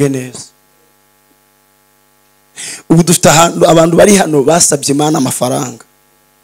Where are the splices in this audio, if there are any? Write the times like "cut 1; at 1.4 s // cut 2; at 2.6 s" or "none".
none